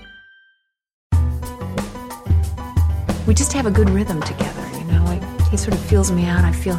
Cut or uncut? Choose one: cut